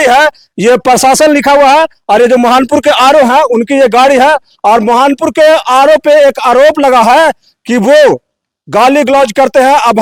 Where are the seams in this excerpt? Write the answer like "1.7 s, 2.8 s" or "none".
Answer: none